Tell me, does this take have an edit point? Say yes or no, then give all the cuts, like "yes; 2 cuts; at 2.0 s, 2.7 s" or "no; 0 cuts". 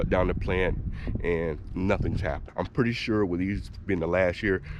yes; 1 cut; at 2.4 s